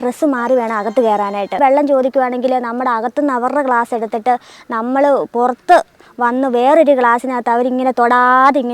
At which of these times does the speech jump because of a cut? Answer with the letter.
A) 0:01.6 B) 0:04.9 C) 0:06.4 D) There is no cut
A